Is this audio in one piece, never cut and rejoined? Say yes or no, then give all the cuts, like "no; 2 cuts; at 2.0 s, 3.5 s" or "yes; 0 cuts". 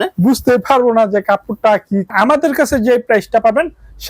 no; 1 cut; at 2.1 s